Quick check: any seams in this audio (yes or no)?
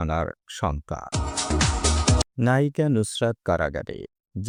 no